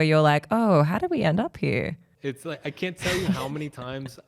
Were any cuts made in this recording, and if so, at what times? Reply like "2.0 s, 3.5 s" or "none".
2.1 s

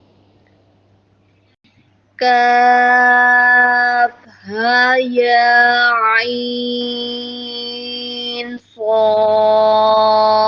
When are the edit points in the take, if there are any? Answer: 1.6 s

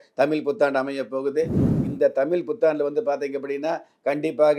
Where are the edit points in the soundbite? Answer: 1.7 s

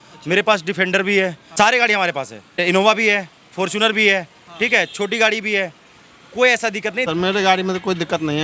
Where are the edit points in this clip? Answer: 1.4 s, 2.6 s, 7.1 s

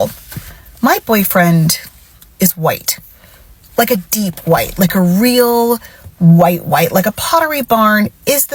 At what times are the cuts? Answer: none

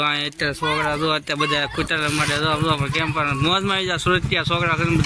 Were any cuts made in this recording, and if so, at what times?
none

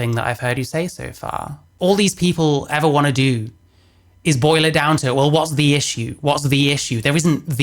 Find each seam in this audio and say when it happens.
1.7 s

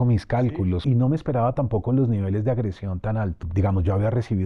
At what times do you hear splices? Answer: 0.8 s, 3.4 s

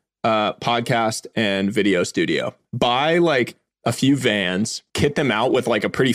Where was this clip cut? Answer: 2.6 s, 4.8 s

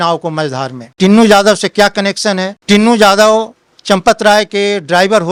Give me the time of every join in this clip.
none

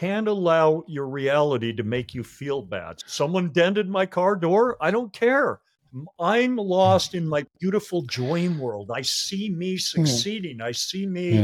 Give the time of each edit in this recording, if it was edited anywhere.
2.9 s

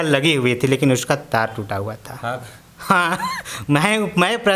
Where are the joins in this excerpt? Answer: none

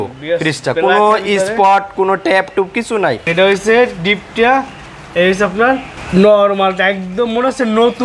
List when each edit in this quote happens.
3.3 s, 5.9 s

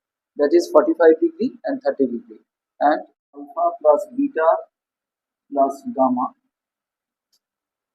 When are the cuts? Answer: 3.4 s

